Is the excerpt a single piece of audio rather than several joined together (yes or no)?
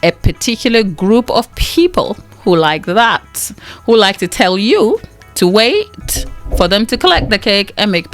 yes